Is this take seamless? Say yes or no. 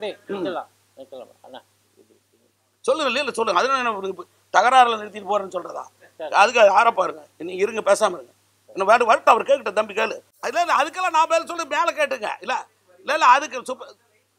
no